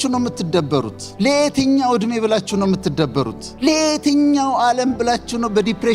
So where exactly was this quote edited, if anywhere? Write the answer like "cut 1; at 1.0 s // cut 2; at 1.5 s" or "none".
cut 1; at 1.0 s // cut 2; at 3.4 s